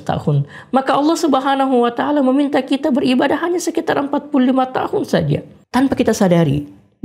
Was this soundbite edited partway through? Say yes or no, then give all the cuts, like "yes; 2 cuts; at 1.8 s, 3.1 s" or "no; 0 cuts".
yes; 1 cut; at 5.5 s